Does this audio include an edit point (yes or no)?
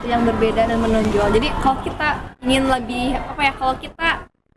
no